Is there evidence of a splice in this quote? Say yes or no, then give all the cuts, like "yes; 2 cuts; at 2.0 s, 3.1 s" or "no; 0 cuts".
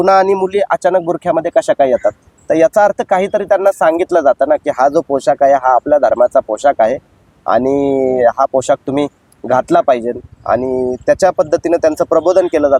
no; 0 cuts